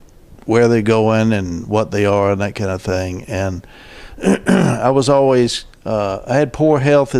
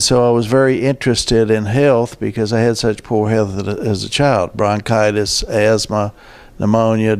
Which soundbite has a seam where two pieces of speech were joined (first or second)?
first